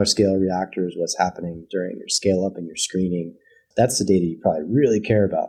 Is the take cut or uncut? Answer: uncut